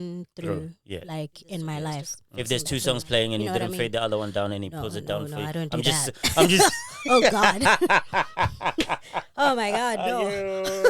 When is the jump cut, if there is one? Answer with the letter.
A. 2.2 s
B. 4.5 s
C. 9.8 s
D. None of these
A